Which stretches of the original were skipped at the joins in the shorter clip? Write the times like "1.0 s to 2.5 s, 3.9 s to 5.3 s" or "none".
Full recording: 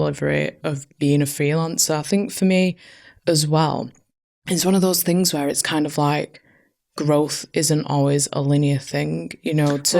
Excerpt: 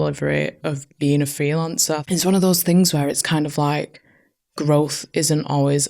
2.0 s to 4.4 s